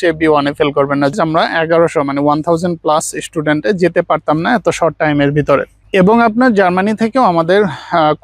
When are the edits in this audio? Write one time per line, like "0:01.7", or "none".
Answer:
0:01.1